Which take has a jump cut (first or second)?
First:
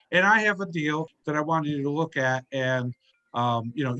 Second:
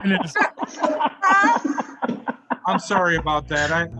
first